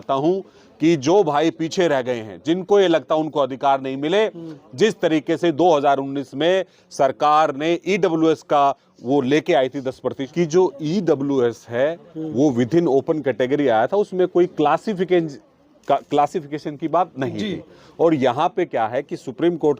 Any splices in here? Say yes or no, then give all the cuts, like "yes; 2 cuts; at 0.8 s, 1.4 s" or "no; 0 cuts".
yes; 1 cut; at 10.1 s